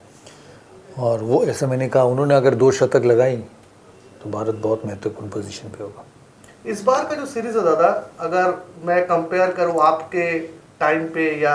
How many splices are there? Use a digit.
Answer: 0